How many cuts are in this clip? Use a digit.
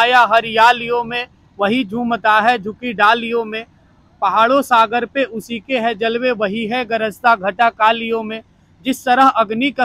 0